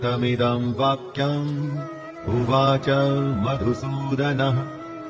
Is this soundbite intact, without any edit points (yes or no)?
yes